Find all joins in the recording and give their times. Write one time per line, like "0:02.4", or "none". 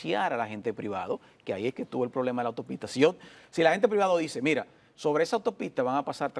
none